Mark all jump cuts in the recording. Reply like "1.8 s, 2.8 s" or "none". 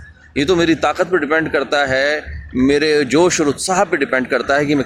none